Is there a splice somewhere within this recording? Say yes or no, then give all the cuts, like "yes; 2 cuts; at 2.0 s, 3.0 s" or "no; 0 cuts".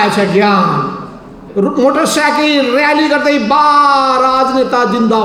yes; 1 cut; at 1.4 s